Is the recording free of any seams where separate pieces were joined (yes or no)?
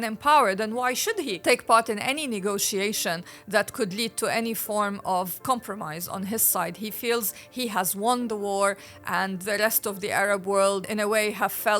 no